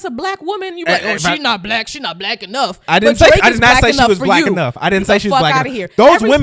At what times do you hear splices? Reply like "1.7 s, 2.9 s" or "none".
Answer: none